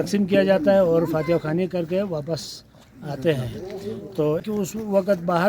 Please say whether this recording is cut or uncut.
cut